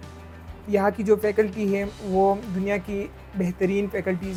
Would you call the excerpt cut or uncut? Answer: uncut